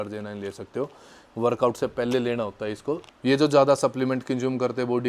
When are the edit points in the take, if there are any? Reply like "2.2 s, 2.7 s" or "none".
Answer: 3.1 s